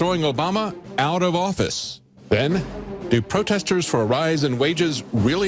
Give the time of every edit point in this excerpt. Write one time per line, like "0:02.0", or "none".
none